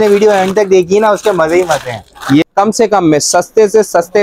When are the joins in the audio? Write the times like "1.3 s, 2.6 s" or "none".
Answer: 2.4 s

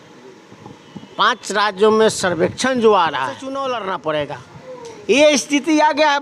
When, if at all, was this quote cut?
3.4 s

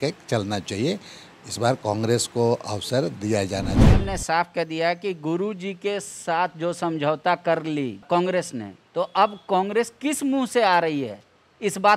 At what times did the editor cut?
3.8 s, 8.0 s

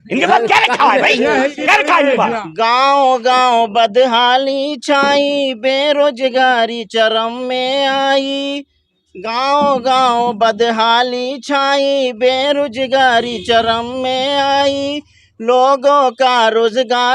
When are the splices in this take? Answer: 2.5 s

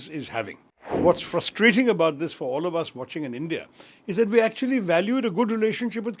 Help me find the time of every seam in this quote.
1.0 s

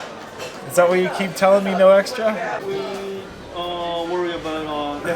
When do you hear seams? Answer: 2.6 s

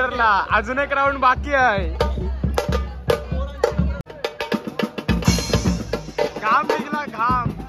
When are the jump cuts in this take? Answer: 4.1 s

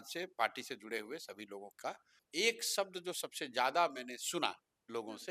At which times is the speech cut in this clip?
2.2 s

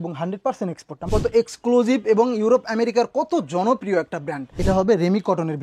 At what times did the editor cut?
1.0 s, 4.5 s

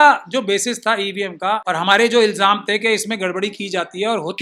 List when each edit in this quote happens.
1.6 s

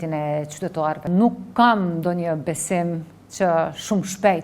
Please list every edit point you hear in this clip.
1.0 s

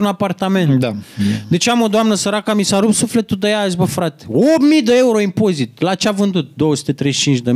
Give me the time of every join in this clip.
none

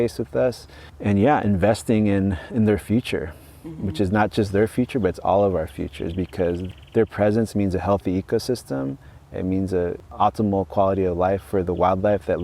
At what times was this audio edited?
6.7 s, 10.1 s

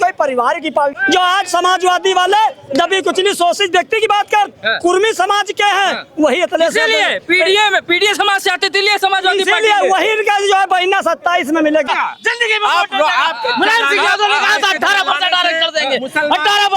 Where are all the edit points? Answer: 1.0 s, 11.9 s

